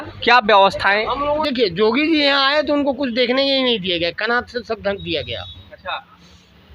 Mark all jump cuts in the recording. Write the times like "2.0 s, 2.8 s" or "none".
1.4 s